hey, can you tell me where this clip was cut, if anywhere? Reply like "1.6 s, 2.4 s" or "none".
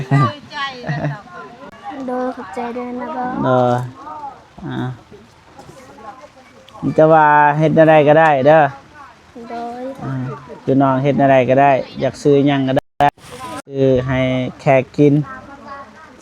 1.7 s